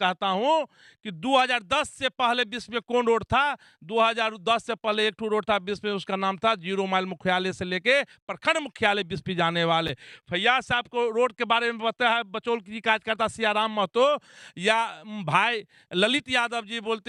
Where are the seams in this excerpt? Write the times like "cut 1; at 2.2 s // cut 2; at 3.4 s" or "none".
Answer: none